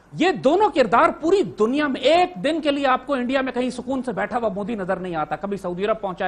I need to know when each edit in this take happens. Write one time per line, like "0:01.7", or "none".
none